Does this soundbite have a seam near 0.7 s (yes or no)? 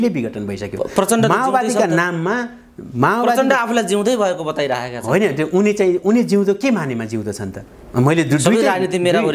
no